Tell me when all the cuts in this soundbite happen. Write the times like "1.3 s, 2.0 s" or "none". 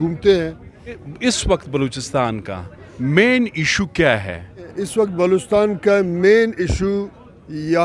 1.1 s, 4.8 s